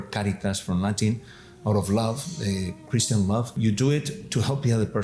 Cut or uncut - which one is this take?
cut